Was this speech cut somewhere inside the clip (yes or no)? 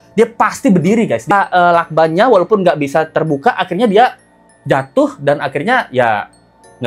yes